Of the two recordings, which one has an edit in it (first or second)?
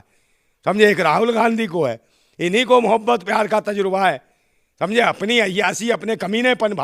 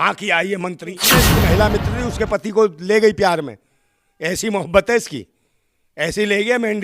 second